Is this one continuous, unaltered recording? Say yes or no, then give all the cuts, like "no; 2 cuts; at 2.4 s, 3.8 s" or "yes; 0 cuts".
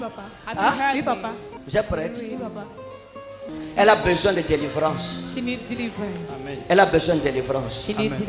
no; 2 cuts; at 1.5 s, 3.5 s